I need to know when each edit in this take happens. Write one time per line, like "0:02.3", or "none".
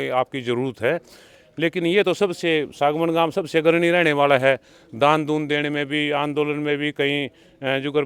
none

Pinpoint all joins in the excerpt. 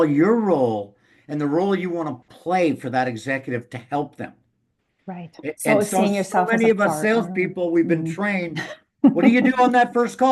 none

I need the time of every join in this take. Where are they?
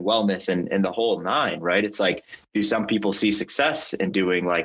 0:02.3

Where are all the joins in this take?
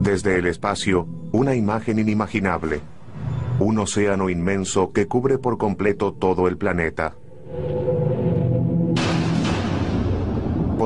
none

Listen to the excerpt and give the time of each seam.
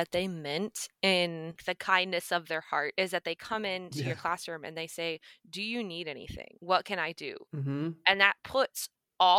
0:02.9
0:07.3

